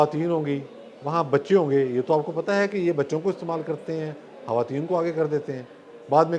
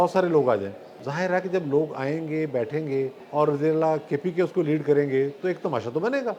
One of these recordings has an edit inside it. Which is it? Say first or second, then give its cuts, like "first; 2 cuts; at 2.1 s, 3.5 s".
second; 2 cuts; at 1.0 s, 3.2 s